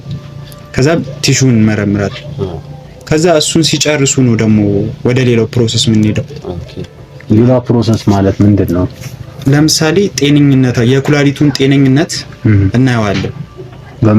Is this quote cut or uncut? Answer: uncut